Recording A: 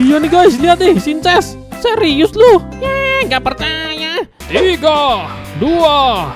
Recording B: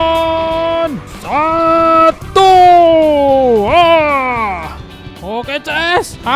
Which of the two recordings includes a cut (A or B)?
A